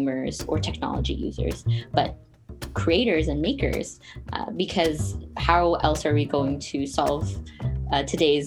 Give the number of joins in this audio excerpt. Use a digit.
0